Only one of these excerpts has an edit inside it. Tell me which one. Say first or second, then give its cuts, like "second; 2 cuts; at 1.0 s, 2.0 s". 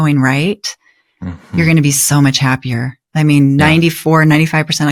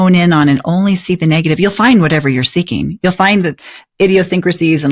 second; 1 cut; at 3.6 s